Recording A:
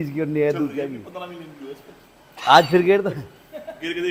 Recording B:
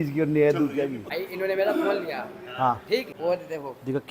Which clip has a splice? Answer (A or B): B